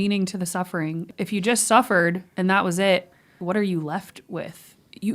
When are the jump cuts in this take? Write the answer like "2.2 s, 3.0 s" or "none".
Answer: 1.1 s, 3.4 s